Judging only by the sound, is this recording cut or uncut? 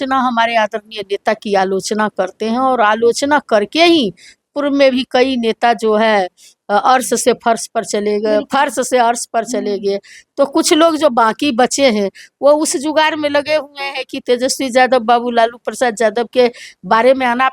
uncut